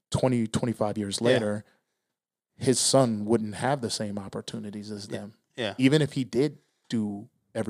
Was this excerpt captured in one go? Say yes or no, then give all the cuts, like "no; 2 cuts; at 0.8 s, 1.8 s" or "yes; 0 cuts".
yes; 0 cuts